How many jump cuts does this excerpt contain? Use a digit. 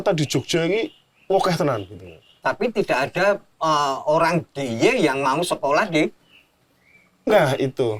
0